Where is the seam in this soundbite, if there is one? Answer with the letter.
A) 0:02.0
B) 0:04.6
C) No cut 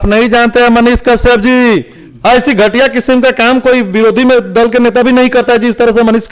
A